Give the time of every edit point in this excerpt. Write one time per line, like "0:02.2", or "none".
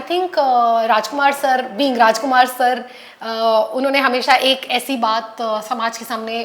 none